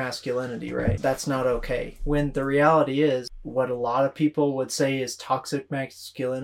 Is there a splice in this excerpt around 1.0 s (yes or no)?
yes